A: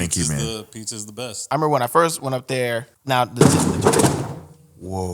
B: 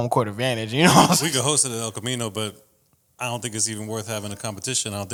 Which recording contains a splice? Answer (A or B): A